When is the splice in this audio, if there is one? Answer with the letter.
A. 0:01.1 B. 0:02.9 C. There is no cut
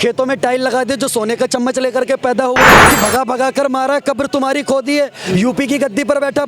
B